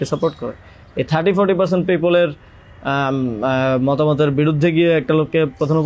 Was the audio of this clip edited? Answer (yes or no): no